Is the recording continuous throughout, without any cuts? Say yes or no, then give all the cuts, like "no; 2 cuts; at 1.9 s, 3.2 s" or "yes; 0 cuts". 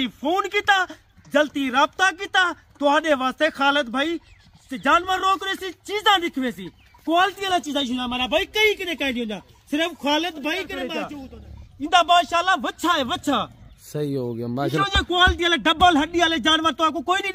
no; 1 cut; at 11.0 s